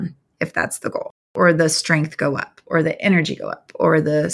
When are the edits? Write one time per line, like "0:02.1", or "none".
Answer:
0:01.3